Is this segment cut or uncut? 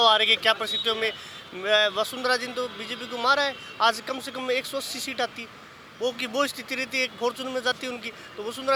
uncut